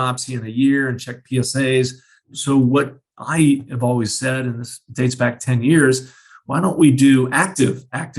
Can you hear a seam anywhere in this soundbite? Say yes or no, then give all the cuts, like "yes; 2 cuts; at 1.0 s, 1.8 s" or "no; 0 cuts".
yes; 1 cut; at 2.3 s